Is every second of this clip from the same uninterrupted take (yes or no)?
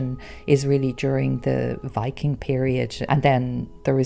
no